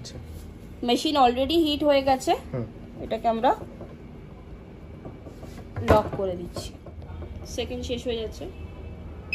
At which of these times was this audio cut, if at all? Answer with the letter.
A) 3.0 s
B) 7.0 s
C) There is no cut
B